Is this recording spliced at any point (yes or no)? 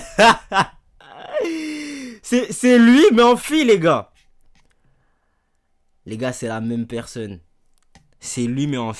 no